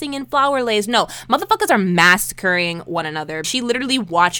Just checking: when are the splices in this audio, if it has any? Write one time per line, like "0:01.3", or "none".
0:03.5